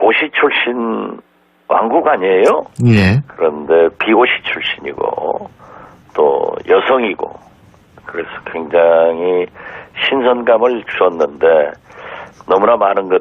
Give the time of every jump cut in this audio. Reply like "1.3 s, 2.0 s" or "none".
6.4 s